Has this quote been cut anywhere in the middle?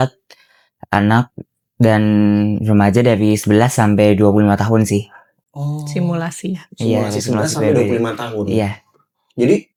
no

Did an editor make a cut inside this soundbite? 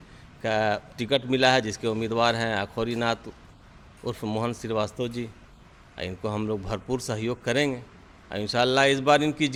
no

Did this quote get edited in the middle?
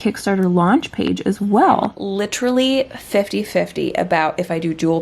yes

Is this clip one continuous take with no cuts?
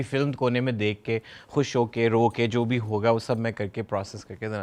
yes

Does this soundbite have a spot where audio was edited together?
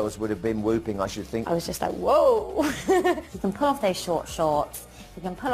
yes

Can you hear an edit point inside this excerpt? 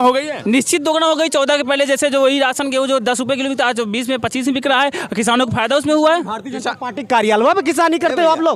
no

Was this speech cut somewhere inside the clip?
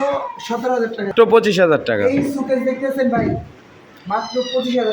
yes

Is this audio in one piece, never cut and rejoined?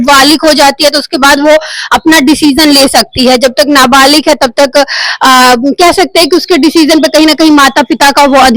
yes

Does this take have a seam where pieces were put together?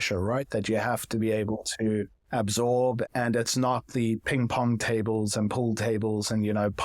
yes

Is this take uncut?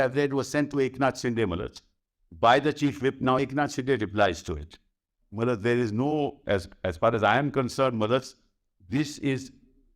no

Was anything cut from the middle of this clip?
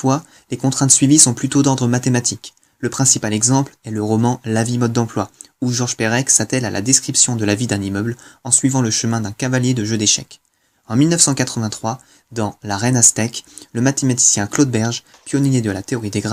no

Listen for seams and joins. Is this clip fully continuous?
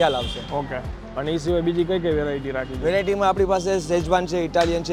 yes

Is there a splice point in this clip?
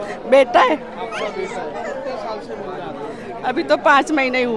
no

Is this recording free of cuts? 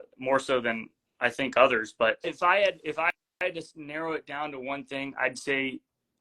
no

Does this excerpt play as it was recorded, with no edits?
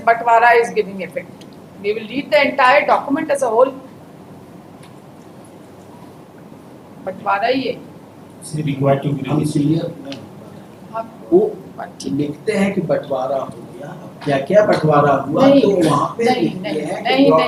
yes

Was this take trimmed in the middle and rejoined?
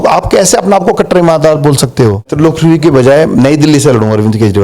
yes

